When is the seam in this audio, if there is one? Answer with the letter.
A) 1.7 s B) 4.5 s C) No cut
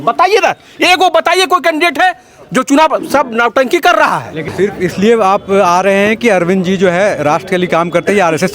B